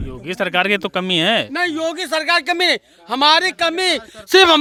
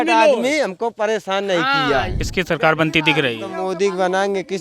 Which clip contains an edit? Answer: second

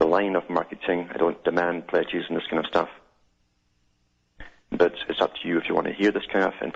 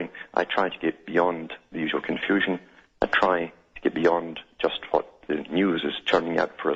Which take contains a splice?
first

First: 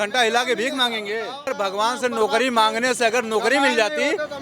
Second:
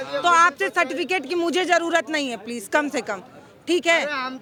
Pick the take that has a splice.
first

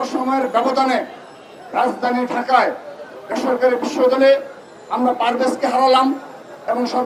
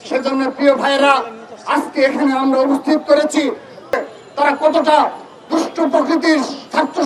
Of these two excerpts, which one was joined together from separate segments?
second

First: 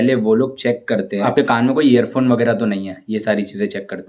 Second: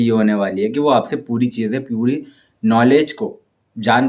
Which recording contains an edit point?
first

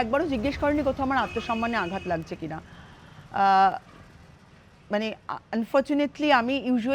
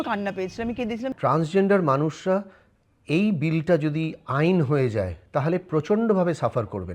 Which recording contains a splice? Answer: second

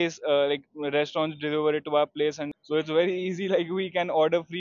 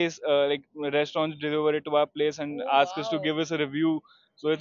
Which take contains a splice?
first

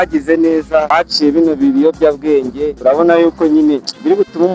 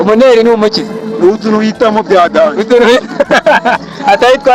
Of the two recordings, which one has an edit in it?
first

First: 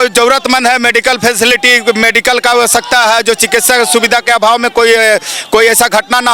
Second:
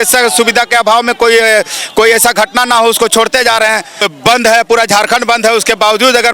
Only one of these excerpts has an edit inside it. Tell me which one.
second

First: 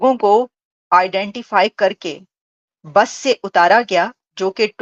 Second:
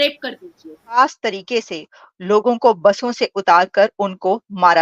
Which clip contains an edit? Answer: second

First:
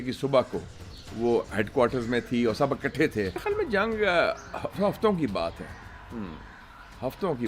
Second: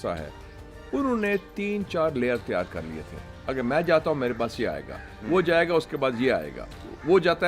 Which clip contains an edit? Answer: first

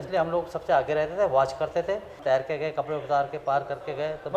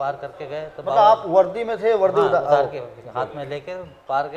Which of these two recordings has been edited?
first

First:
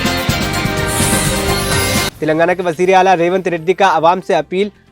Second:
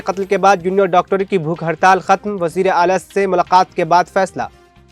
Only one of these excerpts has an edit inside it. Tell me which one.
first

